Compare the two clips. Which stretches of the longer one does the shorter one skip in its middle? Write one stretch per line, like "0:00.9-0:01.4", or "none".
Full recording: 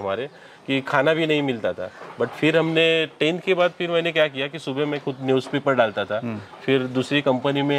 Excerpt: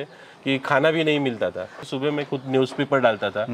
0:02.0-0:04.5